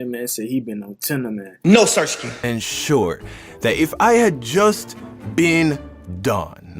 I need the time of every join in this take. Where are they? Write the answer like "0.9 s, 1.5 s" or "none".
2.3 s